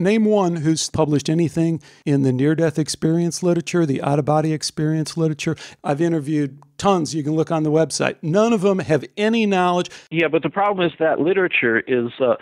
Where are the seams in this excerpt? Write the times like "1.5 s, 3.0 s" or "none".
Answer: 0.9 s, 1.9 s, 5.7 s, 10.1 s